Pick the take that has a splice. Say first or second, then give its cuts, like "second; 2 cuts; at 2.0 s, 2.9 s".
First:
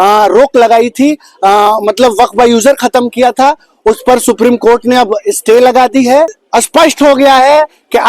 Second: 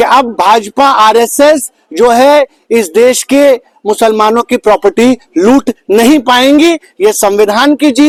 first; 1 cut; at 6.4 s